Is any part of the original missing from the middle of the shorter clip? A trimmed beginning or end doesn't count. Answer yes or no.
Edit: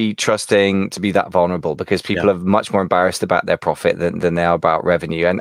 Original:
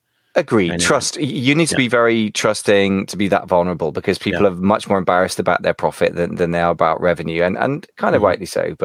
no